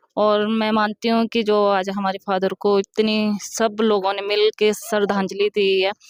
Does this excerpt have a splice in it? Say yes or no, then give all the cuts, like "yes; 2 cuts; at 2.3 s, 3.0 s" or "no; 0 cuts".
no; 0 cuts